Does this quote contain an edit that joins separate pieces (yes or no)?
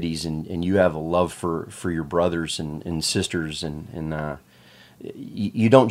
no